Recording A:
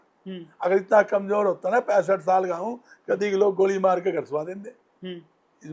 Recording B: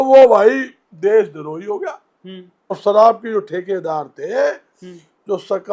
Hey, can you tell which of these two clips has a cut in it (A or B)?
B